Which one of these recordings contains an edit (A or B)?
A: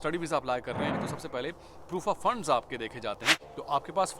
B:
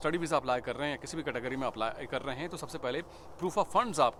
A